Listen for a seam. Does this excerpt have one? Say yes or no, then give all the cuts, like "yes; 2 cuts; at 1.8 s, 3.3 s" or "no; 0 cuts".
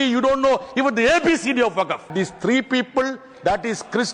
yes; 1 cut; at 2.1 s